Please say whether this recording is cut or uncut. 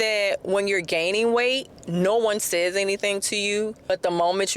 cut